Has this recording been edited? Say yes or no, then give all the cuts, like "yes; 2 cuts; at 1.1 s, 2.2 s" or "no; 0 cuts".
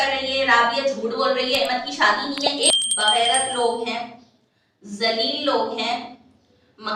yes; 1 cut; at 2.7 s